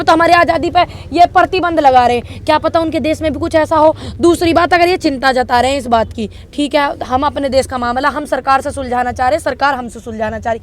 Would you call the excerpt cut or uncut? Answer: uncut